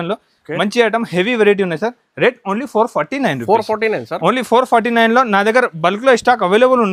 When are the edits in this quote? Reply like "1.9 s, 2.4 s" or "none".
none